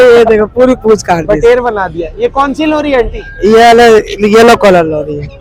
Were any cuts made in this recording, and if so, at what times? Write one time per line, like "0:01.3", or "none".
none